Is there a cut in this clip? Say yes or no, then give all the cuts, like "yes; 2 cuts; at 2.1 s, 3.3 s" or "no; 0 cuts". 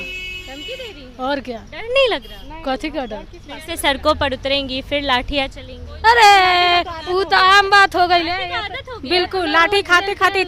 no; 0 cuts